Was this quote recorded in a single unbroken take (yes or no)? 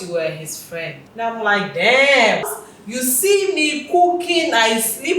no